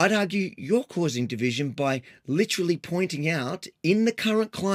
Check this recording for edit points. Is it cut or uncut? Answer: uncut